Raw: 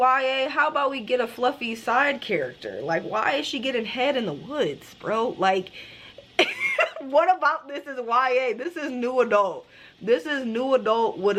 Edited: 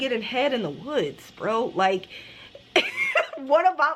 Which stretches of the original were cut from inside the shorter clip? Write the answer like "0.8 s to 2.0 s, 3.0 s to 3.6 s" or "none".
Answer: none